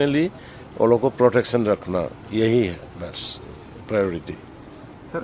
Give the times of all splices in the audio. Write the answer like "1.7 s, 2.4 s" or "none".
none